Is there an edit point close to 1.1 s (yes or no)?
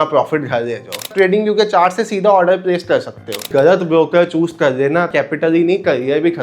yes